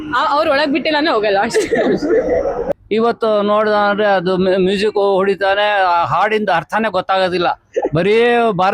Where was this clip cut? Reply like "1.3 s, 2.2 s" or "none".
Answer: 2.7 s